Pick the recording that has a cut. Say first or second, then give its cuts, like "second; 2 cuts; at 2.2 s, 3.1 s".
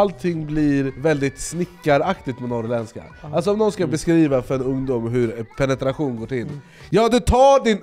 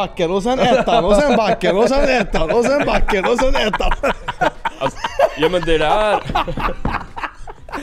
first; 1 cut; at 0.9 s